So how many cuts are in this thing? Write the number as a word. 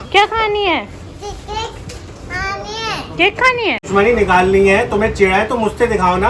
one